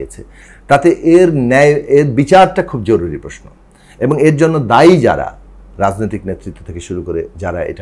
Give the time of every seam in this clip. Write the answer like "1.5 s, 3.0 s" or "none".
none